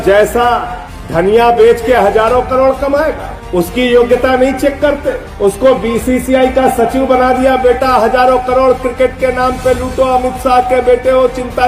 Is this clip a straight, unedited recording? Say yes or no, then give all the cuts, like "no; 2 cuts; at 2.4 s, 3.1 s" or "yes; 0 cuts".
yes; 0 cuts